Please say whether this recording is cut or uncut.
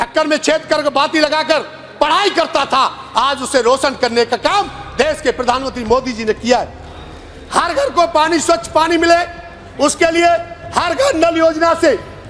uncut